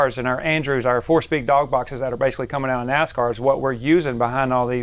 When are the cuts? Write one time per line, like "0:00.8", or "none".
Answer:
none